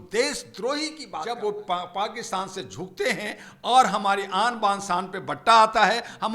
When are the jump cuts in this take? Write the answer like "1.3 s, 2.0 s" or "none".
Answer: 1.3 s

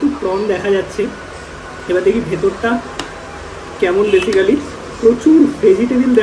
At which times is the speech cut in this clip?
none

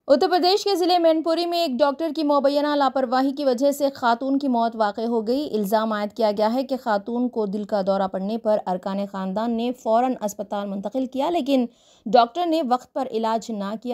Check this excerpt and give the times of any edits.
none

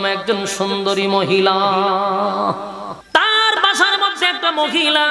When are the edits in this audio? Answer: 2.9 s

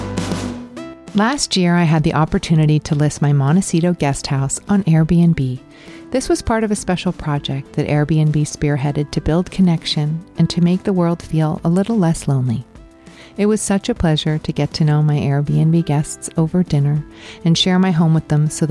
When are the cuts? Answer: 1.0 s

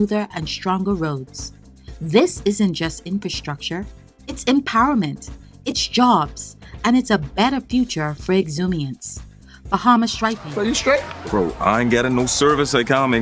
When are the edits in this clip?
10.4 s

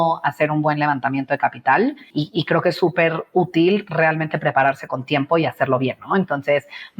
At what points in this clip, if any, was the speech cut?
2.1 s

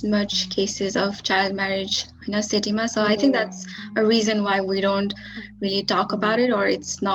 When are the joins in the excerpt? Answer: none

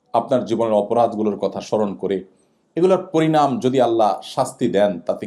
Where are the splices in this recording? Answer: none

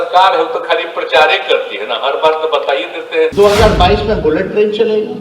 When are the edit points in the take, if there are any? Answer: 3.3 s

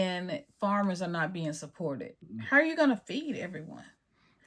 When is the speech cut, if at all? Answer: 2.1 s

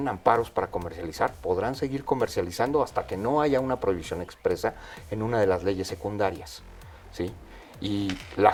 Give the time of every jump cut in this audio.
none

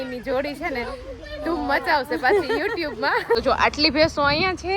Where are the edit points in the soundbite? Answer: 3.4 s

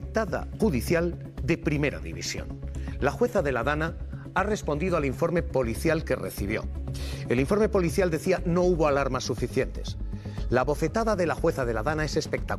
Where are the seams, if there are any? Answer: none

